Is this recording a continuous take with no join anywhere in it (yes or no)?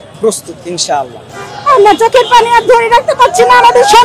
no